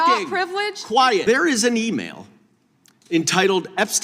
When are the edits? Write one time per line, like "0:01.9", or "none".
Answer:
0:01.2